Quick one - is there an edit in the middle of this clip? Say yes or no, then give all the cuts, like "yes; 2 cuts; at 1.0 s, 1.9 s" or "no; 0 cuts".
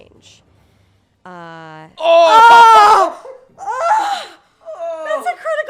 no; 0 cuts